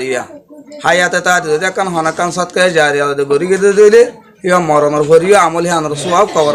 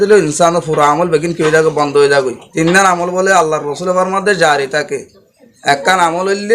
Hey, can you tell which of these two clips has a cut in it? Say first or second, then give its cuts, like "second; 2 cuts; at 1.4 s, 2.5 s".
second; 1 cut; at 2.4 s